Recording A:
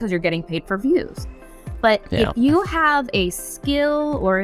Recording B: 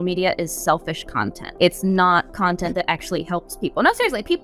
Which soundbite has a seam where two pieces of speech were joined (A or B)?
B